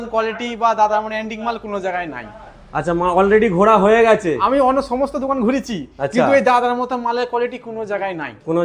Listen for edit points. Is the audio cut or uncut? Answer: uncut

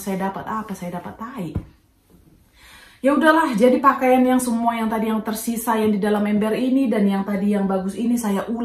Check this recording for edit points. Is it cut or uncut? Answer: uncut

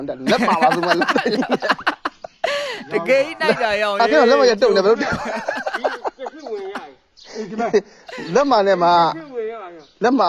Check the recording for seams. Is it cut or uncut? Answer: uncut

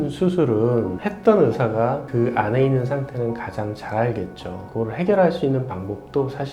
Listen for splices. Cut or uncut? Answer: cut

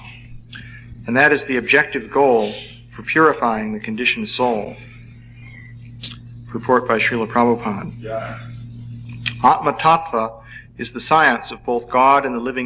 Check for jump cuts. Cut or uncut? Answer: uncut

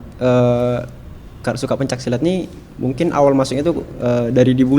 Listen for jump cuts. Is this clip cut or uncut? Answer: uncut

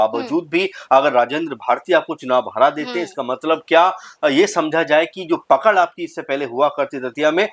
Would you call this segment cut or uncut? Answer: uncut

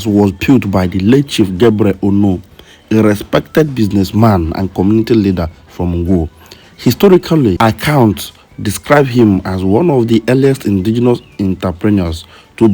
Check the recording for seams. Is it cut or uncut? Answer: cut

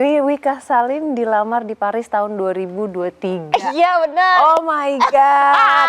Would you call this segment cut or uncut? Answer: uncut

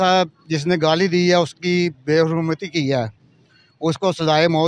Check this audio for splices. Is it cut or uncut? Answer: uncut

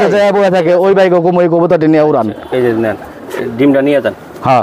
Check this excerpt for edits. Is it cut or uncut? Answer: uncut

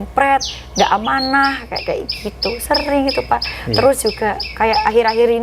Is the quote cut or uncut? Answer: uncut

